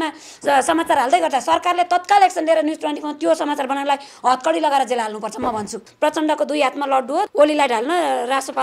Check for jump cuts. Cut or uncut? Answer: cut